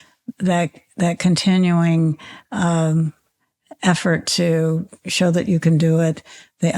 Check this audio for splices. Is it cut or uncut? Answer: uncut